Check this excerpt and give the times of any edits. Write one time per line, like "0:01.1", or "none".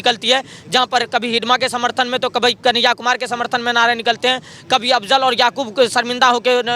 none